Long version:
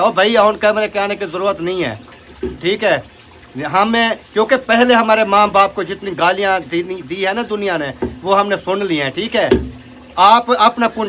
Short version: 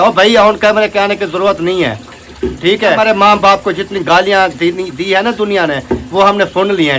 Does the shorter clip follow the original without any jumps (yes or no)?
no